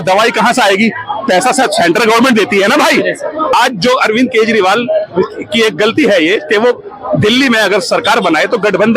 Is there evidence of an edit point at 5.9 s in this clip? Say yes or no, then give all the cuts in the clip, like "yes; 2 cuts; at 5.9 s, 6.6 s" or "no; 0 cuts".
no; 1 cut; at 3.5 s